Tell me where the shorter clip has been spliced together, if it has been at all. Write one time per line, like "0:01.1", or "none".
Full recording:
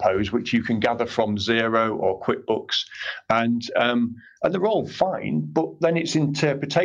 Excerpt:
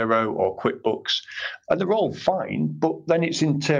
0:01.5